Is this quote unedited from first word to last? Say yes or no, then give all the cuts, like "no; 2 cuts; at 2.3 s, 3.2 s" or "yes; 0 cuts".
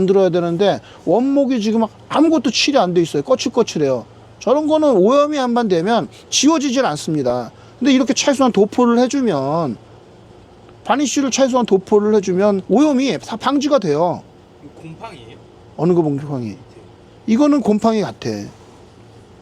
yes; 0 cuts